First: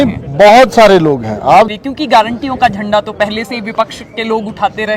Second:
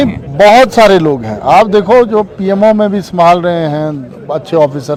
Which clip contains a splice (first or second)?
first